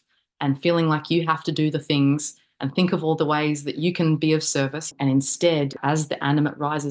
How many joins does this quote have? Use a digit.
2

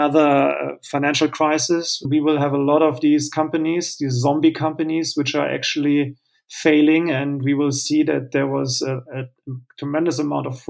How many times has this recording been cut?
1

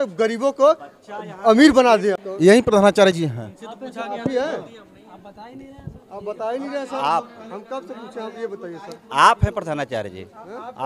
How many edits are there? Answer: 1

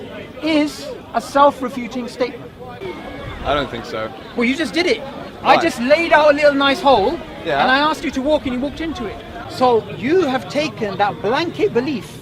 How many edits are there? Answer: 2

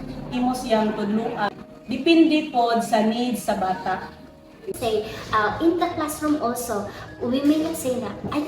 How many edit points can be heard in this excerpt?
2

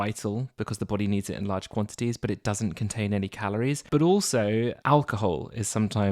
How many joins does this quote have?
2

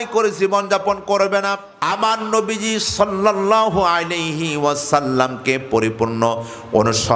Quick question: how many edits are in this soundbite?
1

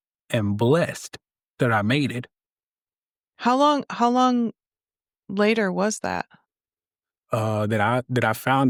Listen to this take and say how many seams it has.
0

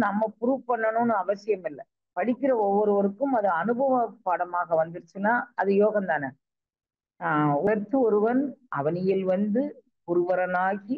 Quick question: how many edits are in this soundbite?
1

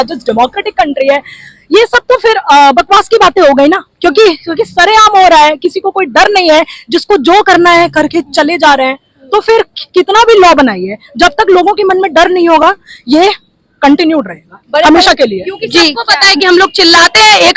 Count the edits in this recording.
0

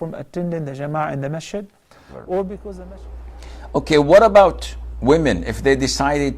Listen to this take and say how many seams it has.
1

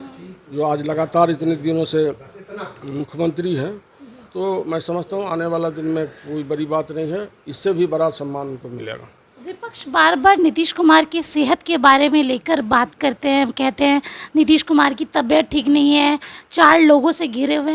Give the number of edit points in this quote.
0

